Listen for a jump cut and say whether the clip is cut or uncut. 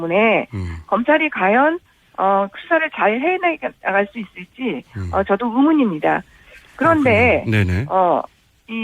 cut